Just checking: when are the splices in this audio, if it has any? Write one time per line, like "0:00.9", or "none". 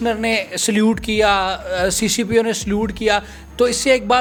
none